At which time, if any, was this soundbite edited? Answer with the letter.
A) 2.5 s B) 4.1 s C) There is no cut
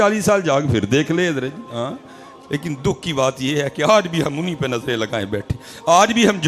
A